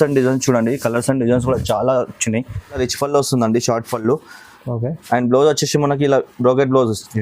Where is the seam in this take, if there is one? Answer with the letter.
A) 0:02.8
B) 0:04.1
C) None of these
A